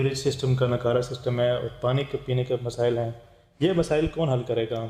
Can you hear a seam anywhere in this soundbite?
no; 0 cuts

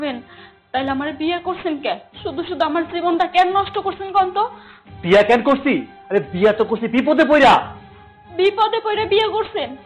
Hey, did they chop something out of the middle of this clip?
no; 0 cuts

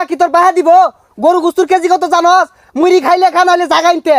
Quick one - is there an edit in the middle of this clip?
no; 0 cuts

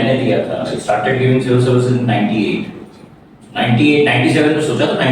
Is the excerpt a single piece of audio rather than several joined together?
yes; 0 cuts

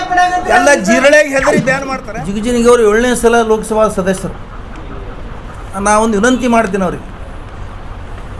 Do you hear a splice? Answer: yes; 2 cuts; at 1.8 s, 5.6 s

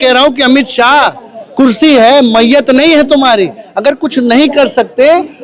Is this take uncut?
yes; 0 cuts

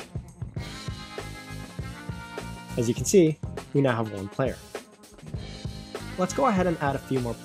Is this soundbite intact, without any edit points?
no; 3 cuts; at 2.7 s, 4.6 s, 6.2 s

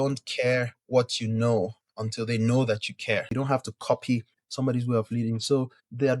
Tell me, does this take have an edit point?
yes; 1 cut; at 3.3 s

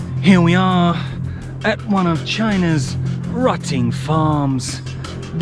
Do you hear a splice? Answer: no; 0 cuts

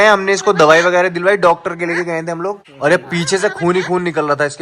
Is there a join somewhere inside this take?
yes; 1 cut; at 2.7 s

